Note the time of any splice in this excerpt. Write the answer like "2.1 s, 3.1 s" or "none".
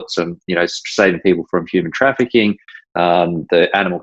none